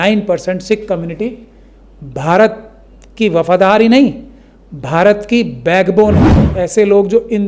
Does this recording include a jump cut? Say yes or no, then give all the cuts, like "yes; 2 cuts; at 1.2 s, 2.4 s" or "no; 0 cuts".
yes; 1 cut; at 6.4 s